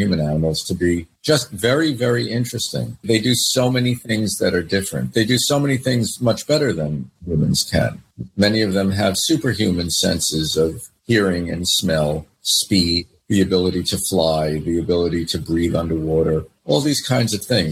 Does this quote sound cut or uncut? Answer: uncut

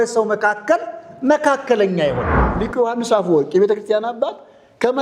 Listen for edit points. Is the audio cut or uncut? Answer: cut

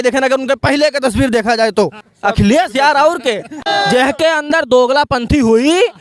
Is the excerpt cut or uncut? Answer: cut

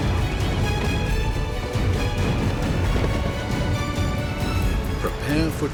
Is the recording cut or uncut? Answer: uncut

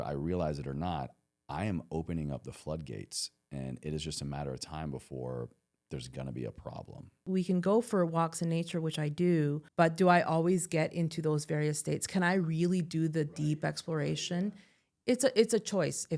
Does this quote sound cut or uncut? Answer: cut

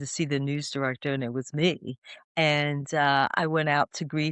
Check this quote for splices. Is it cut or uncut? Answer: uncut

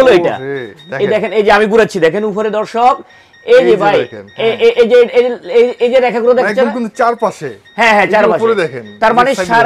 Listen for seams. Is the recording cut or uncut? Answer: uncut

